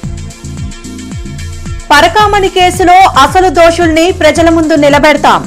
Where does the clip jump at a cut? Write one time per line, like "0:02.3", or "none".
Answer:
none